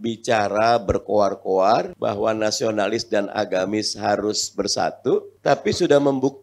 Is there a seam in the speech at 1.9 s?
yes; 2 cuts; at 1.9 s, 5.3 s

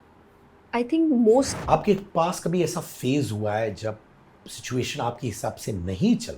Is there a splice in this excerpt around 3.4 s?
no; 1 cut; at 1.5 s

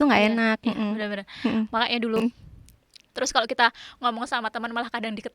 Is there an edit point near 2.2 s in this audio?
yes; 1 cut; at 2.2 s

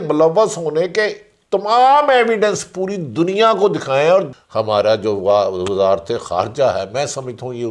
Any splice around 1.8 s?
no; 1 cut; at 4.4 s

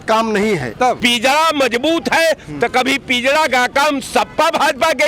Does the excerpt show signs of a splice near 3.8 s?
no; 1 cut; at 1.0 s

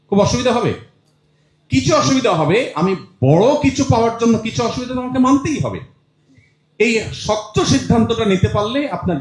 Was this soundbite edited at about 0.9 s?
no; 0 cuts

